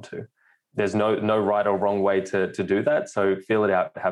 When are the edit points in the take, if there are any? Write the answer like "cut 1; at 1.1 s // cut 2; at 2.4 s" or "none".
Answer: none